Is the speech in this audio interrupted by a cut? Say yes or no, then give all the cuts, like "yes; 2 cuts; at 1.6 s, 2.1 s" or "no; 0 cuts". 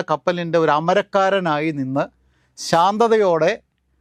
no; 0 cuts